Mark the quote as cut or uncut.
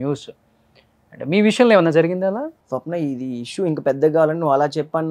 cut